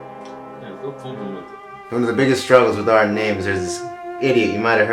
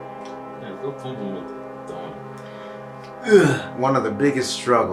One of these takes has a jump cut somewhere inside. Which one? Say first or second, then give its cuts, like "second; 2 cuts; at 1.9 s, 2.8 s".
first; 1 cut; at 1.7 s